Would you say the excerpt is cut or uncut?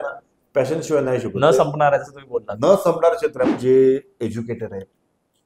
cut